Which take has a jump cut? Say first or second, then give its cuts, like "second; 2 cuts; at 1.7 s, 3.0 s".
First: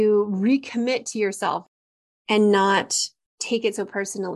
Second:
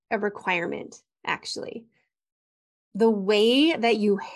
first; 1 cut; at 1.6 s